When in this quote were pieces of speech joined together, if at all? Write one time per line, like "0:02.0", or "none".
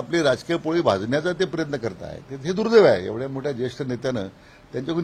none